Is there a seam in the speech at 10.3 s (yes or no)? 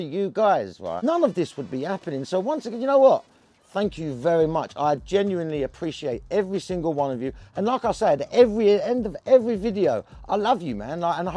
no